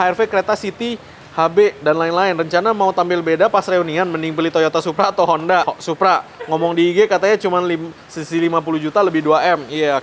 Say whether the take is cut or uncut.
uncut